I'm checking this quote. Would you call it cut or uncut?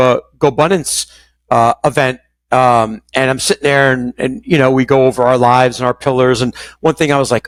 uncut